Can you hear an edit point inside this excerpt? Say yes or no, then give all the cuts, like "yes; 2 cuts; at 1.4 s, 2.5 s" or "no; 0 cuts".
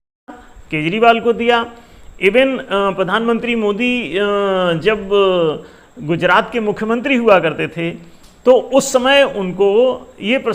no; 0 cuts